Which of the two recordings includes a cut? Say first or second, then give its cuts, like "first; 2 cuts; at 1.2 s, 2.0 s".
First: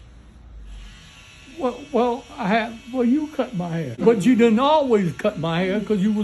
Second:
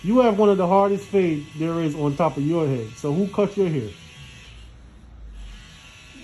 first; 1 cut; at 3.9 s